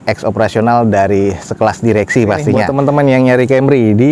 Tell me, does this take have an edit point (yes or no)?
yes